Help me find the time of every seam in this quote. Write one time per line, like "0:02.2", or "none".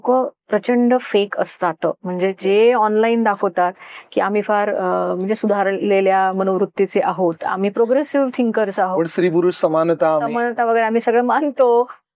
0:07.4